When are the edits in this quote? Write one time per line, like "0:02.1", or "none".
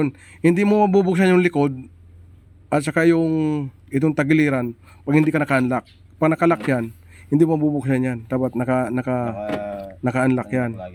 none